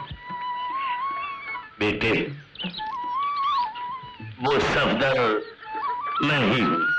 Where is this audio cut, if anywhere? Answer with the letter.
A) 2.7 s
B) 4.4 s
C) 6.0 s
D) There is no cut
D